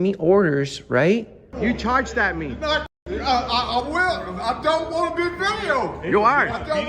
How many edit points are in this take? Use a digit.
1